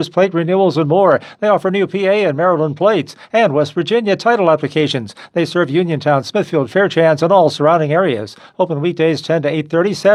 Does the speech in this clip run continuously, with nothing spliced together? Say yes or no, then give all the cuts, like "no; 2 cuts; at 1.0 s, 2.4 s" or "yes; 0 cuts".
yes; 0 cuts